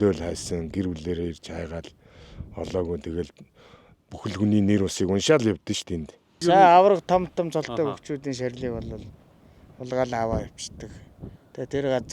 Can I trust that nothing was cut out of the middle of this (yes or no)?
no